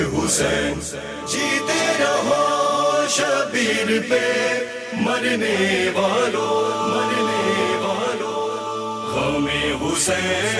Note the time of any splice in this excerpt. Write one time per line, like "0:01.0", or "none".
0:00.9